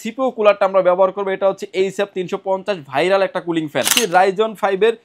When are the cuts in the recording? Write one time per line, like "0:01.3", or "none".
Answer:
0:04.0